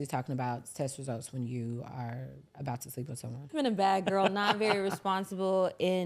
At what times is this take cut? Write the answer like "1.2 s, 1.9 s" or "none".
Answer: 3.4 s